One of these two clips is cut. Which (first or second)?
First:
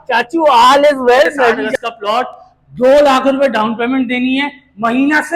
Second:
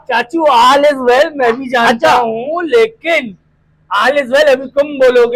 first